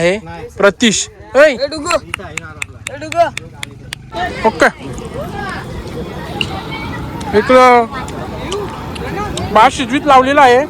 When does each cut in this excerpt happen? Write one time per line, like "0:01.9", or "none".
0:04.1